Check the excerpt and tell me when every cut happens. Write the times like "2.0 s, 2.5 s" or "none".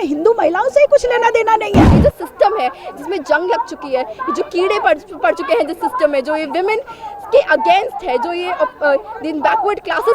1.9 s